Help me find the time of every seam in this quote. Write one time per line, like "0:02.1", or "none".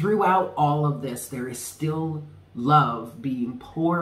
none